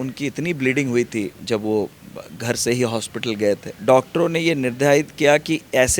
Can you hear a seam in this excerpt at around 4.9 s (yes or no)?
no